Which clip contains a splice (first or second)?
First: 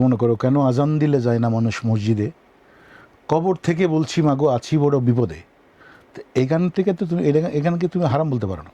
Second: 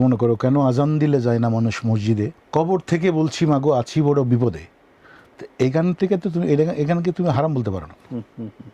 second